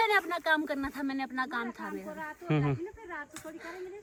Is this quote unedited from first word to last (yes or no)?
yes